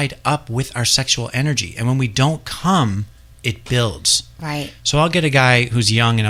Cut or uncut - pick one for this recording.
uncut